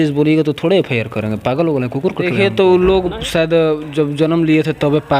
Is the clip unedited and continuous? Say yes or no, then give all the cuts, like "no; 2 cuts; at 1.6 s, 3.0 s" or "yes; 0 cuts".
no; 1 cut; at 2.3 s